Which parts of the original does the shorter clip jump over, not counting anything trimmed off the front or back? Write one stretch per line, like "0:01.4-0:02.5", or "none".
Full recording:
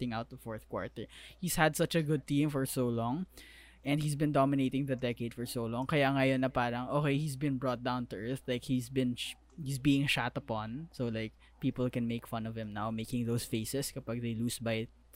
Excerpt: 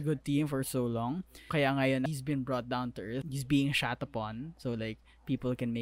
0:03.4-0:05.8
0:06.4-0:07.2
0:08.4-0:09.6